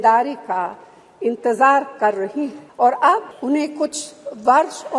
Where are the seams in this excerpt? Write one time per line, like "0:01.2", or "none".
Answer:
0:02.6
0:03.3